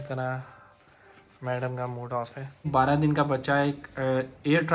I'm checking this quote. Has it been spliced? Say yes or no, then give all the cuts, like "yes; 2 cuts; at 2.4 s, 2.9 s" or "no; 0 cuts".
yes; 1 cut; at 2.7 s